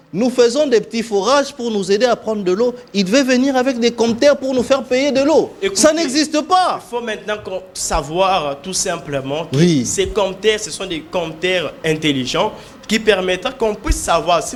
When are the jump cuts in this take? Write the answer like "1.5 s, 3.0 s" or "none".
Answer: none